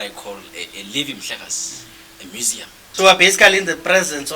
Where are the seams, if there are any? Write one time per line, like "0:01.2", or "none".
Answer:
0:02.8

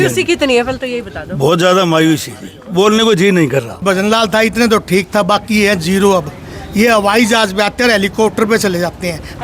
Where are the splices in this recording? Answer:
0:03.8

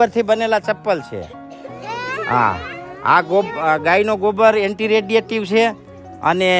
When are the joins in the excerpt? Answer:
none

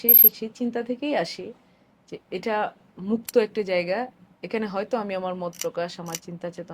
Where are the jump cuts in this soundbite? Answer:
none

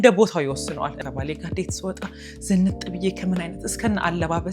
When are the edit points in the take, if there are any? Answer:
0:00.9

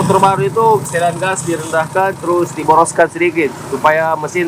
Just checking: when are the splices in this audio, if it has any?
none

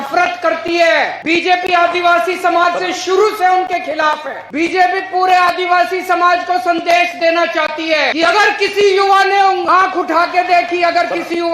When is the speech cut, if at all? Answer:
0:01.2
0:04.4
0:08.1
0:09.6

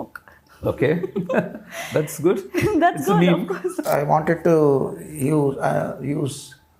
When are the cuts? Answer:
0:03.9

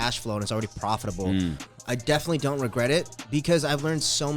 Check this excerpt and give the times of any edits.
0:01.7

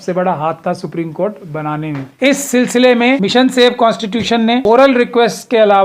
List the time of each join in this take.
0:02.1
0:03.2
0:04.6

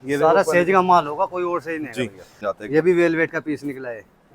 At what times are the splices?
0:02.5

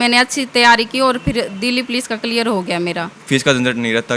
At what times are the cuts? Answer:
0:03.1

